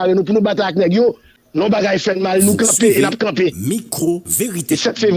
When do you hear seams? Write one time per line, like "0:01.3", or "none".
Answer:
0:01.3